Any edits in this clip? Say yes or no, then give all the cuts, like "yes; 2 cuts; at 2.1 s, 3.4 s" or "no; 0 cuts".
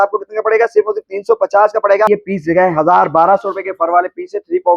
yes; 1 cut; at 2.1 s